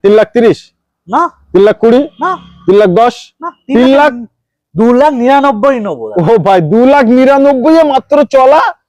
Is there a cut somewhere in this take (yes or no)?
no